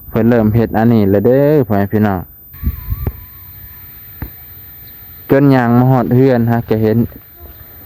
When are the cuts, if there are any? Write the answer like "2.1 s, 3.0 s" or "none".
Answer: 2.4 s